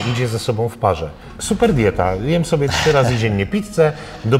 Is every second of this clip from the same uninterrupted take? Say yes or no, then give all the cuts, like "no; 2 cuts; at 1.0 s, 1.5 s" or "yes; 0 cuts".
no; 1 cut; at 1.3 s